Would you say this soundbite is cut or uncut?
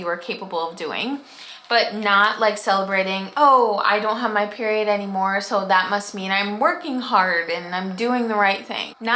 uncut